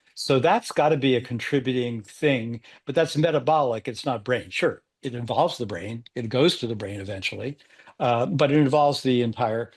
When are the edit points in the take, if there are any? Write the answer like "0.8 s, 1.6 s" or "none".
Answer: none